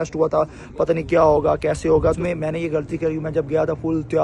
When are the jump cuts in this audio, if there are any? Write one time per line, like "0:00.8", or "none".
0:02.2